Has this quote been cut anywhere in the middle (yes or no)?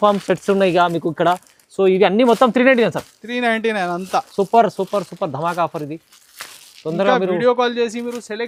no